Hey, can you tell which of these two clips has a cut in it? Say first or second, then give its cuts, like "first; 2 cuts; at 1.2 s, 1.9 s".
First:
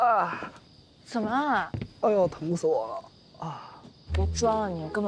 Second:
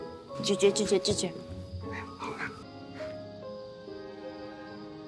second; 1 cut; at 2.6 s